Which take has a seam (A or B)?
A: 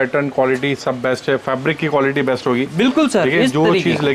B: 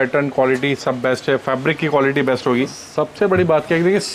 B